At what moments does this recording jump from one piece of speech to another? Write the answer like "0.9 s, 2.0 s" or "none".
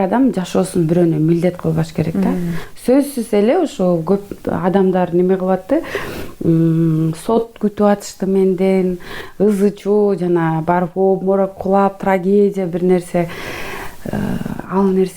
none